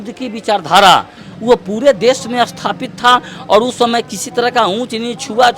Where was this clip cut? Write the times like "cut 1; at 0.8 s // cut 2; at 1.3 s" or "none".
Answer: none